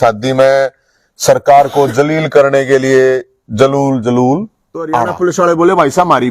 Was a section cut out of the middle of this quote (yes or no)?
yes